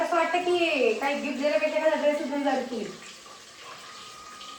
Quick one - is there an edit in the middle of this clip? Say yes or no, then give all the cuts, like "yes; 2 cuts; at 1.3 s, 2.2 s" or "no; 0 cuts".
no; 0 cuts